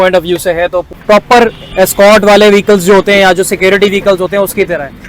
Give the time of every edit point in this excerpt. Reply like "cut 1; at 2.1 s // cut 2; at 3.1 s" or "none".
cut 1; at 0.9 s